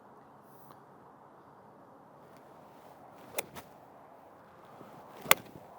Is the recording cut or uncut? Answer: cut